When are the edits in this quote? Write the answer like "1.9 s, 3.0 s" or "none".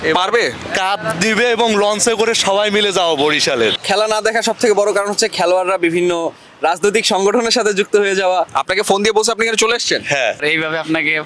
3.8 s, 8.6 s, 10.4 s